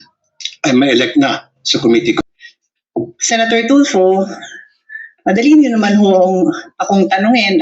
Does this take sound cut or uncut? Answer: cut